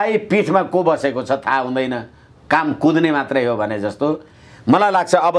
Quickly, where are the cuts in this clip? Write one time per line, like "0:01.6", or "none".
none